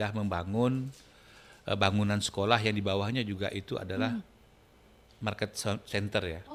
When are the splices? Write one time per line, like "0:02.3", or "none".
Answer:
none